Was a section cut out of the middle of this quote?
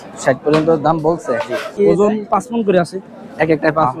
yes; 1 cut; at 1.7 s

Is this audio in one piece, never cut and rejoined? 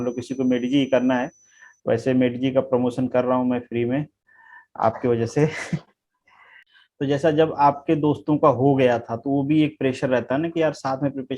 no; 1 cut; at 6.7 s

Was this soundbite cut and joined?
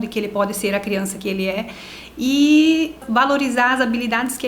yes; 1 cut; at 3.0 s

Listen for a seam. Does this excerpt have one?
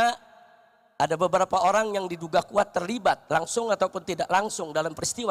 no; 0 cuts

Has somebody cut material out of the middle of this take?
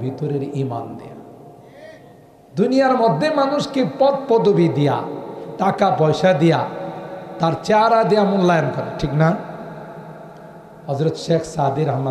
no; 0 cuts

